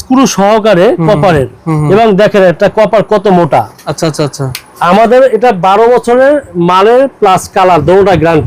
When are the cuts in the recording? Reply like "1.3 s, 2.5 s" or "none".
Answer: none